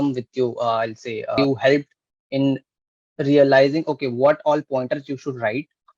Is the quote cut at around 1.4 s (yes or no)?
yes